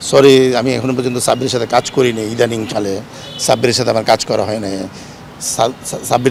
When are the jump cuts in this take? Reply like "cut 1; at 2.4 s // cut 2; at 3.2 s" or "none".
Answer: none